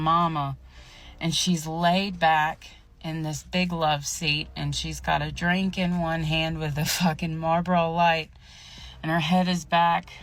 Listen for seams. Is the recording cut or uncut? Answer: uncut